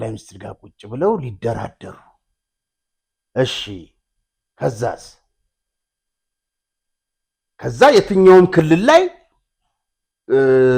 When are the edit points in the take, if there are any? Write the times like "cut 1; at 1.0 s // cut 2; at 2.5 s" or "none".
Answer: none